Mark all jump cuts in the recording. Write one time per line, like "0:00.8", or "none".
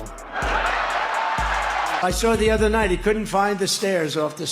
0:02.0